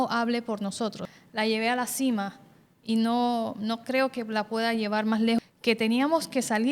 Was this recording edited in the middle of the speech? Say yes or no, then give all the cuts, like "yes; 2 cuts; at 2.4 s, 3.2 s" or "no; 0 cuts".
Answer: yes; 2 cuts; at 1.1 s, 5.4 s